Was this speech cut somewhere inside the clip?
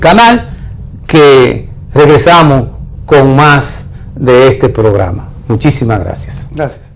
no; 0 cuts

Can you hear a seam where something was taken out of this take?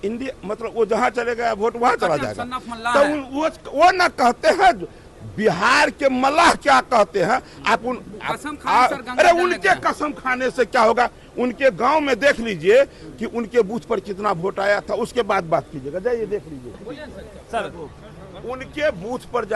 yes; 1 cut; at 16.8 s

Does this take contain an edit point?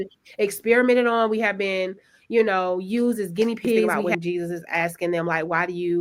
yes; 1 cut; at 4.0 s

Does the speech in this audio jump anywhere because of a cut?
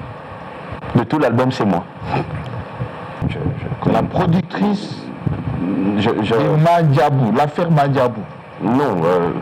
yes; 1 cut; at 3.2 s

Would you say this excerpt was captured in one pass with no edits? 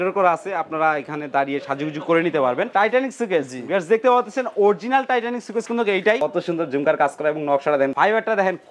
no; 3 cuts; at 2.7 s, 6.2 s, 7.9 s

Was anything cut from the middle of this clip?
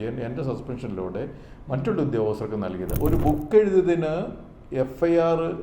yes; 1 cut; at 2.9 s

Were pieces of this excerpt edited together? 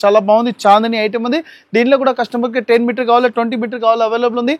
no; 0 cuts

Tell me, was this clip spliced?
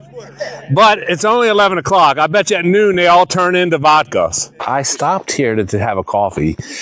yes; 1 cut; at 4.6 s

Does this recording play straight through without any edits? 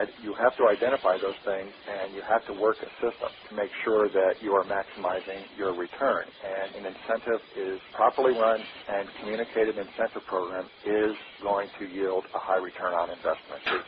yes; 0 cuts

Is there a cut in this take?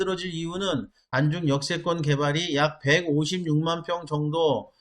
yes; 1 cut; at 1.0 s

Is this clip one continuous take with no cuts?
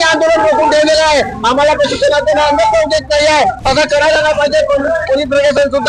yes; 0 cuts

